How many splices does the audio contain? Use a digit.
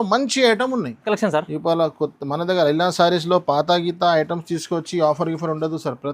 1